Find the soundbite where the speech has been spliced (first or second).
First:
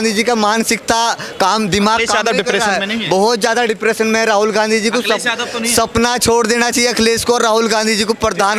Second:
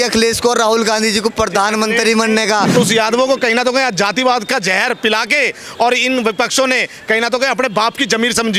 second